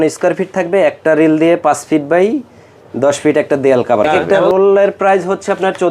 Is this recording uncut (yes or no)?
no